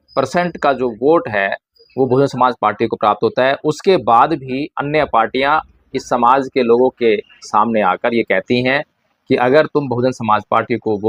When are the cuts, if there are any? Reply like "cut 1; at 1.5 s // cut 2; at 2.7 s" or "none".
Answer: none